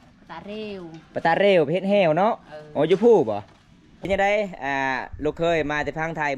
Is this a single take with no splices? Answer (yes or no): no